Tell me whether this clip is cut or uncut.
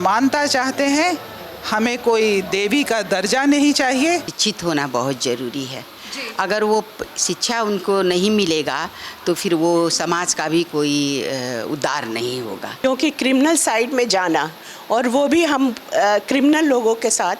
cut